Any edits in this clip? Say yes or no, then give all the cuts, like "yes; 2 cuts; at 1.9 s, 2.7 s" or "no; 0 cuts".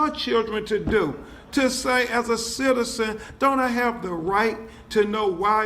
yes; 1 cut; at 2.9 s